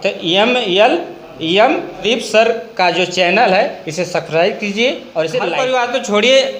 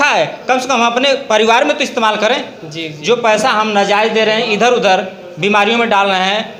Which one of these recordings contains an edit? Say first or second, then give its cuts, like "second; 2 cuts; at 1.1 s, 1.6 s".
first; 2 cuts; at 2.0 s, 5.5 s